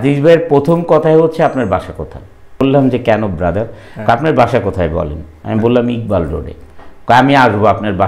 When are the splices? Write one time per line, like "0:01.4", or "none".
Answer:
0:02.6